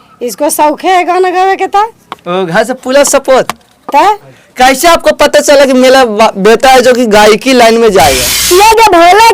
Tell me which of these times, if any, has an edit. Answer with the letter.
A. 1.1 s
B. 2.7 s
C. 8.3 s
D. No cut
C